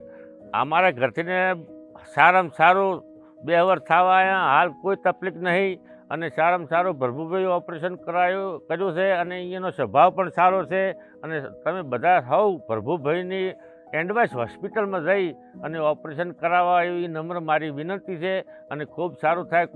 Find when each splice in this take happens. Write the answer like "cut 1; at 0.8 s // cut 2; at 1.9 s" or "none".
none